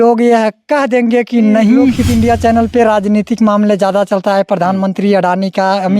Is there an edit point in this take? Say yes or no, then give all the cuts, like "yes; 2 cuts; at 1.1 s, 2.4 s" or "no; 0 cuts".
yes; 1 cut; at 2.0 s